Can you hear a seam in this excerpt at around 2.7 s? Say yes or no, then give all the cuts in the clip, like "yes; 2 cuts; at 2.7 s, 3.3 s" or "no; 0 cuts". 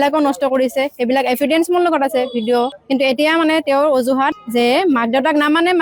yes; 1 cut; at 2.7 s